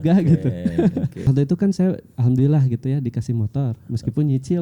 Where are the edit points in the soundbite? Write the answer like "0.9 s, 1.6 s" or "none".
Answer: 1.3 s